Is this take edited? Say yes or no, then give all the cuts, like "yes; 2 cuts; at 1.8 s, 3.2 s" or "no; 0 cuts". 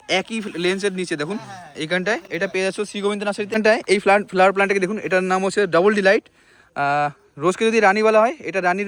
no; 0 cuts